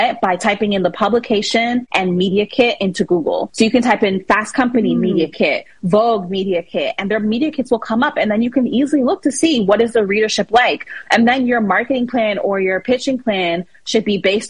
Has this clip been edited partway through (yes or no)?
yes